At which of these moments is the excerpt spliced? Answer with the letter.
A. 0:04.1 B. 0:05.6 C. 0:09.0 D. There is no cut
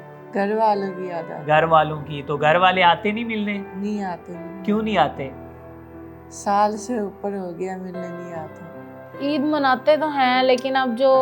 C